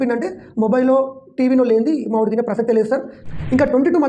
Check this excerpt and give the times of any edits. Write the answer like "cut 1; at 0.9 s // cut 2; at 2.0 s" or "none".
cut 1; at 3.2 s